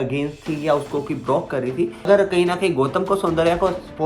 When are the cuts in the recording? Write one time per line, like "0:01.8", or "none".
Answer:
0:02.0